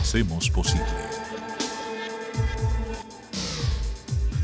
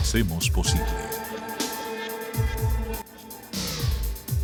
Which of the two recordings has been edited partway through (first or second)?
first